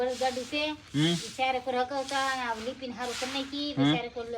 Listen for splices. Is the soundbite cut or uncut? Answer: uncut